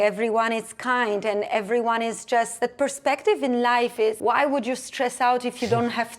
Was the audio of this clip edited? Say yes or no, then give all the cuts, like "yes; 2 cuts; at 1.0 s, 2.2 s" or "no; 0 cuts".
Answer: yes; 2 cuts; at 2.5 s, 4.2 s